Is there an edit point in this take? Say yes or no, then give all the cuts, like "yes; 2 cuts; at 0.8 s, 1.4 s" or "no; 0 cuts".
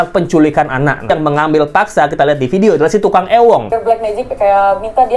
yes; 2 cuts; at 1.1 s, 3.7 s